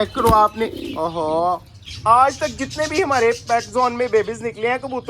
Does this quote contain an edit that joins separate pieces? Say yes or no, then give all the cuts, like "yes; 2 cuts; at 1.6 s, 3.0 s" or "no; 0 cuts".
yes; 1 cut; at 1.9 s